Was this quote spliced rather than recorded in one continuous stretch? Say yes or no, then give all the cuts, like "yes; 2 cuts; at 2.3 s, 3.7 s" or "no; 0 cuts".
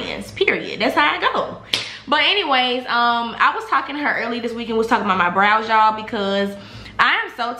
no; 0 cuts